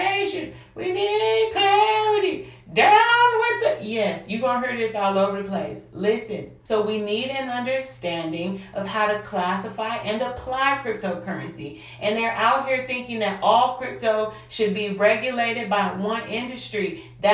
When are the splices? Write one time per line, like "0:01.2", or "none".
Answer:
0:06.5